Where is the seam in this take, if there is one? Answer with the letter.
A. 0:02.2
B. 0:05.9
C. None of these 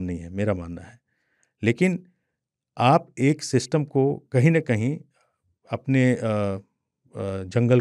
C